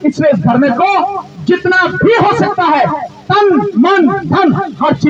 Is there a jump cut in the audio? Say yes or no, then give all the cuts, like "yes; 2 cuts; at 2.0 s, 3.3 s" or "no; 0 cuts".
no; 0 cuts